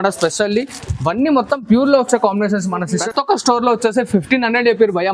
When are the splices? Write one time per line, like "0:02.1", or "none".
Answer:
0:03.0